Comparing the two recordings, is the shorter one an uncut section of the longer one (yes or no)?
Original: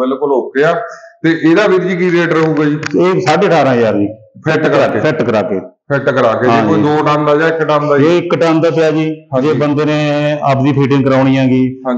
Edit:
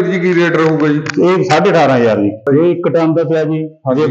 no